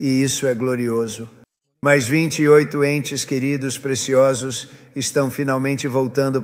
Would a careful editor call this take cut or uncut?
uncut